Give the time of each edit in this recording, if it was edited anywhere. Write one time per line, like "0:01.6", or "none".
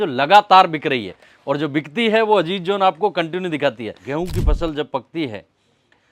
0:03.9